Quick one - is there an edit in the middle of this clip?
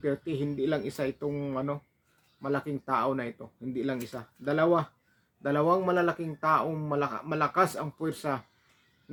no; 0 cuts

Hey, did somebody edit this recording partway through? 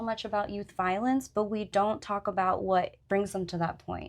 yes; 1 cut; at 3.0 s

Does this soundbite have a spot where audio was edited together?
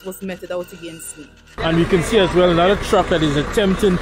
yes; 1 cut; at 1.5 s

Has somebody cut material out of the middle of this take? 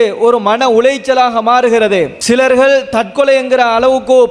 yes; 1 cut; at 2.2 s

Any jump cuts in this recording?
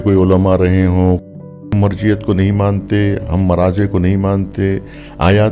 yes; 1 cut; at 1.4 s

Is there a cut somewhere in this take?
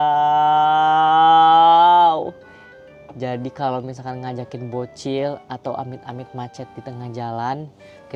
no; 0 cuts

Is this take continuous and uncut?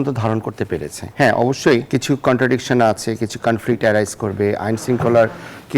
no; 2 cuts; at 1.0 s, 1.9 s

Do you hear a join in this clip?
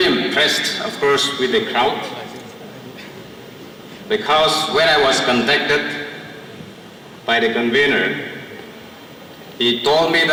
no; 0 cuts

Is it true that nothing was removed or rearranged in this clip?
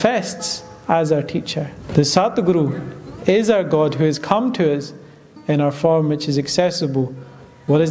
no; 1 cut; at 1.8 s

